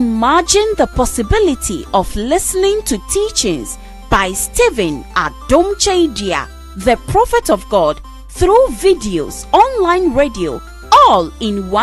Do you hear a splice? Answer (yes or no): no